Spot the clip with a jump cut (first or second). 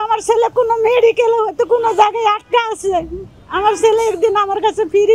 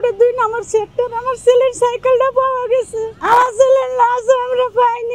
second